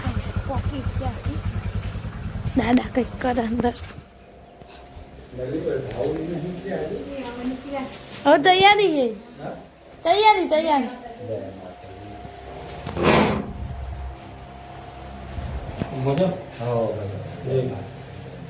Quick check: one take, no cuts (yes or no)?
yes